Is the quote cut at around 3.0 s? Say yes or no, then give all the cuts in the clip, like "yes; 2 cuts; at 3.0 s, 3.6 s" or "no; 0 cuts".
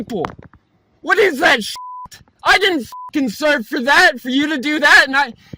no; 1 cut; at 1.7 s